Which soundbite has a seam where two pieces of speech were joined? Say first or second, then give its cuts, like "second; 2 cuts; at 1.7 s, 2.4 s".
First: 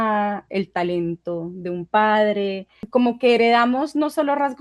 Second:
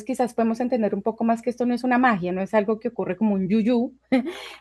first; 1 cut; at 2.7 s